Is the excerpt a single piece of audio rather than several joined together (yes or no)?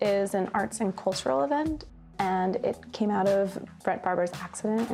yes